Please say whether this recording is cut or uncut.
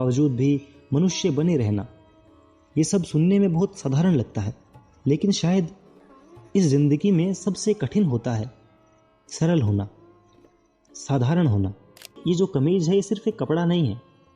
cut